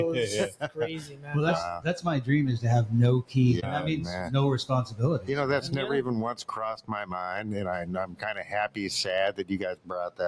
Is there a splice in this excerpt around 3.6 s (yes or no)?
yes